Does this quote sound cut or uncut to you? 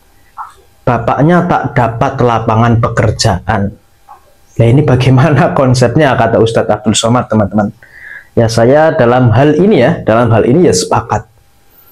uncut